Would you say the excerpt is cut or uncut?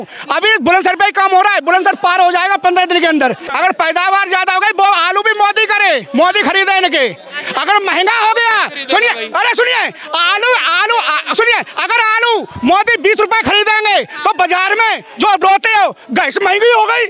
cut